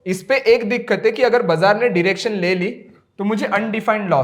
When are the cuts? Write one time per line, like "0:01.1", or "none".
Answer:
none